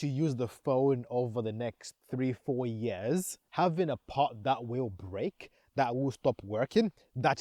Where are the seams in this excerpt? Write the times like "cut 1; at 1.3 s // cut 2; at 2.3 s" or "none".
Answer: cut 1; at 3.4 s